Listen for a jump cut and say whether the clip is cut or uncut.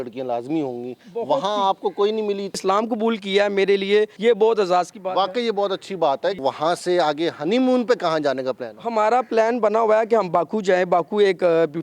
cut